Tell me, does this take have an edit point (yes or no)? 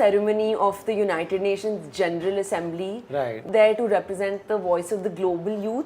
yes